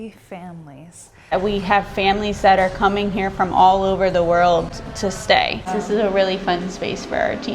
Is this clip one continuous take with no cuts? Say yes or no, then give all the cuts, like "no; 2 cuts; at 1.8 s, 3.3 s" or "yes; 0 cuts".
no; 2 cuts; at 1.3 s, 5.7 s